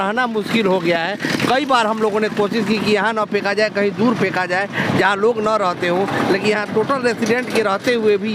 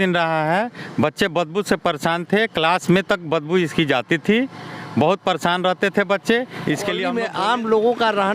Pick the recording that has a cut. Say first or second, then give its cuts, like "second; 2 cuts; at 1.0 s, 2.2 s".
second; 1 cut; at 7.1 s